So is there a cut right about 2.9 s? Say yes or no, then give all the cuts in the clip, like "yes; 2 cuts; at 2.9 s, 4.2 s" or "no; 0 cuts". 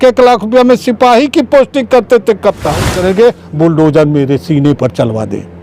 yes; 1 cut; at 2.9 s